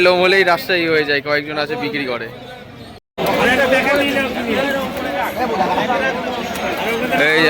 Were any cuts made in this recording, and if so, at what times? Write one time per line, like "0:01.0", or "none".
0:03.0